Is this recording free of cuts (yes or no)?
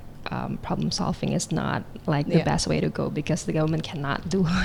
yes